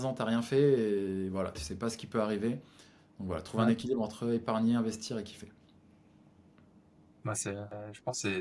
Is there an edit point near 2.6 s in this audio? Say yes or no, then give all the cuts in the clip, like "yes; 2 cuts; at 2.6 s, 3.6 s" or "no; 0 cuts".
no; 0 cuts